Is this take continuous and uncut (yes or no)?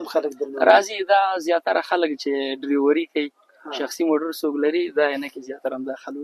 yes